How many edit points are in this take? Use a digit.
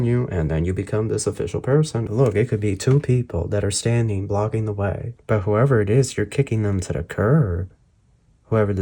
2